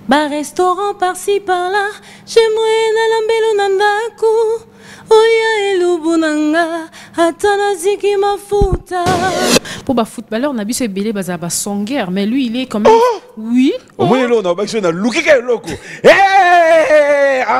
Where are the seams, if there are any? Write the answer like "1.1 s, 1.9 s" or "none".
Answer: 9.7 s